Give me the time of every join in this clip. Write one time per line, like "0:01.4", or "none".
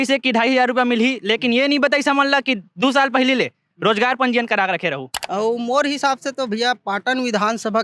0:05.1